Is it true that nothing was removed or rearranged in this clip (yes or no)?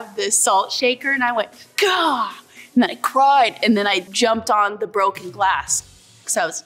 yes